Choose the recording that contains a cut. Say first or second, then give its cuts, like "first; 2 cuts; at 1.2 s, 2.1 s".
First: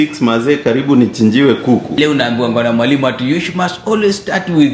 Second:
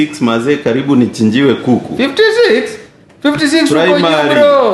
first; 1 cut; at 2.0 s